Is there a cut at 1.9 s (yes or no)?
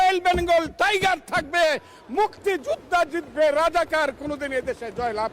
no